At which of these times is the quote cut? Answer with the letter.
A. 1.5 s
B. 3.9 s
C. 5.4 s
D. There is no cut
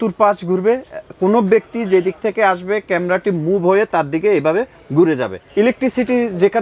C